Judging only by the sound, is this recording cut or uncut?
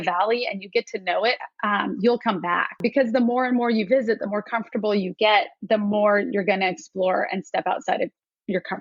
cut